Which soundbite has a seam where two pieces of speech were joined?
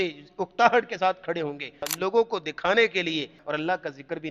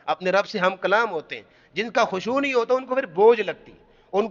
first; 2 cuts; at 1.8 s, 3.4 s

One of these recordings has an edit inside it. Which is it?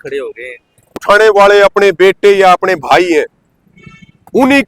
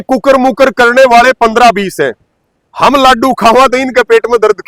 first; 1 cut; at 1.0 s

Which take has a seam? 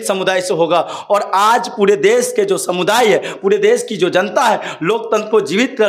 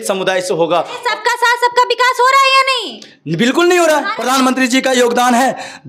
second; 2 cuts; at 0.9 s, 4.1 s

